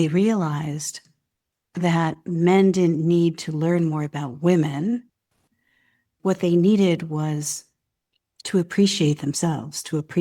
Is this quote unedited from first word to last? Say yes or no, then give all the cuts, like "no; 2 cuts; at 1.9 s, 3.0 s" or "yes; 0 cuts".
no; 1 cut; at 6.1 s